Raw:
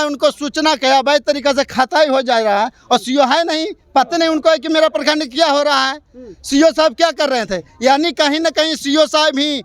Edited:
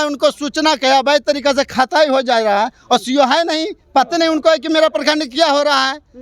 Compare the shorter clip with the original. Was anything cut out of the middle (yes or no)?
no